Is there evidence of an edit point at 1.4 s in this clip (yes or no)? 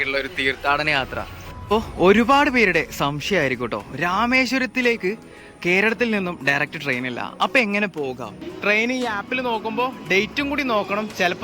yes